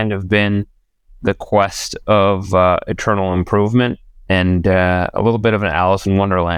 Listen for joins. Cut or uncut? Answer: uncut